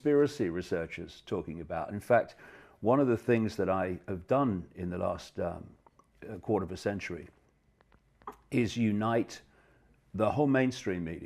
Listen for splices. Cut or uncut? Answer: cut